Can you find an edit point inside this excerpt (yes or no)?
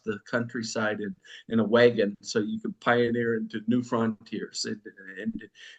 no